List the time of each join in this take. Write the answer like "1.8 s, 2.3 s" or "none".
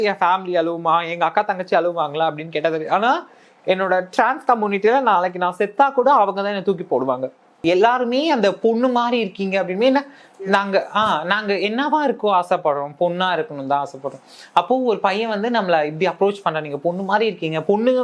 7.6 s

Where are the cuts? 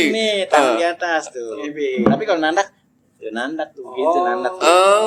none

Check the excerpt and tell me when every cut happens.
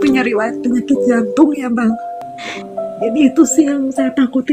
2.1 s

